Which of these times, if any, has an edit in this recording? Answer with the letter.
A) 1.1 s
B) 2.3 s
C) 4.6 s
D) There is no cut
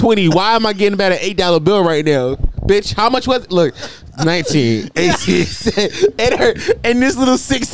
D